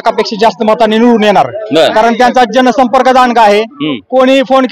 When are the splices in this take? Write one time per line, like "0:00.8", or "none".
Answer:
none

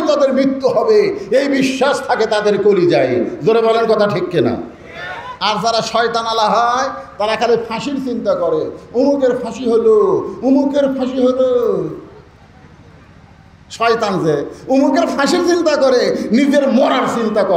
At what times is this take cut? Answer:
none

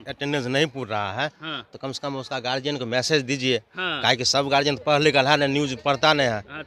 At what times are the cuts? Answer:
none

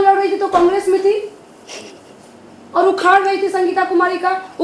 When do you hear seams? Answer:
none

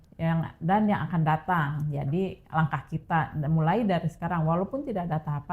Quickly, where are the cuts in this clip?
none

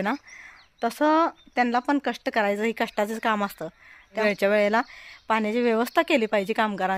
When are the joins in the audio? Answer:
none

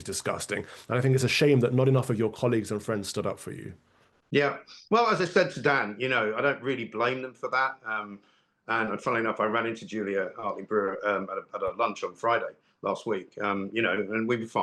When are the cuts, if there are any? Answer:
none

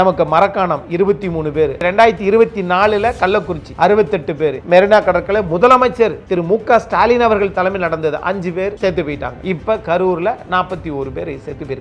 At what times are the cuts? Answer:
0:01.8
0:04.6

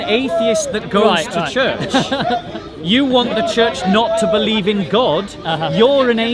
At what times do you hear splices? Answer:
none

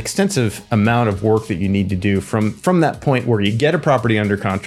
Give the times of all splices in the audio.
none

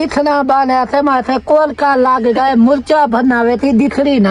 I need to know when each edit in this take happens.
none

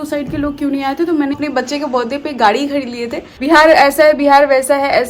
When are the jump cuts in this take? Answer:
0:01.3
0:03.3

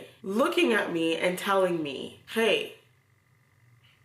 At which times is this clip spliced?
0:02.2

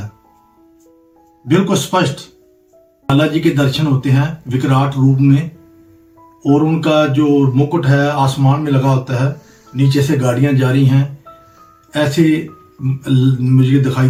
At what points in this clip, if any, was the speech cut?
none

